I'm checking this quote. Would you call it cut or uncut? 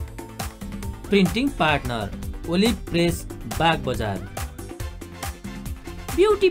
cut